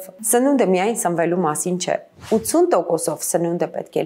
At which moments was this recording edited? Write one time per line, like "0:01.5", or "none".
0:02.1